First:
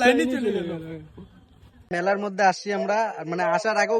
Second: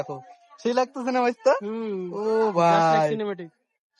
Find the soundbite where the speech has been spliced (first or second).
first